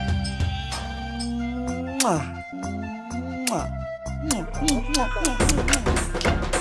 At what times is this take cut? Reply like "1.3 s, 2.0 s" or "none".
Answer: 4.2 s